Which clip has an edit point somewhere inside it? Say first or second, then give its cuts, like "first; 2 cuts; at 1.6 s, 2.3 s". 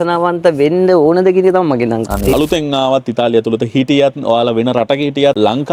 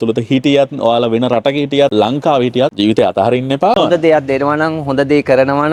first; 1 cut; at 2.3 s